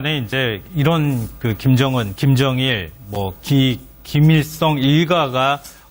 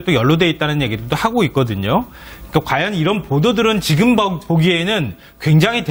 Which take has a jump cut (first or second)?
first